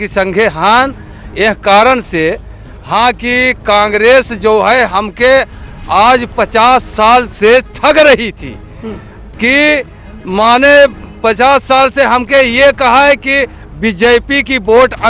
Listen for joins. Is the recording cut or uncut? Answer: uncut